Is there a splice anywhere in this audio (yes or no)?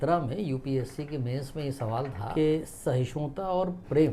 yes